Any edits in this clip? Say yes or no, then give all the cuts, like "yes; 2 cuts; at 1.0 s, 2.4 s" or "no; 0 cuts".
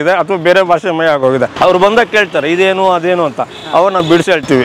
yes; 1 cut; at 1.5 s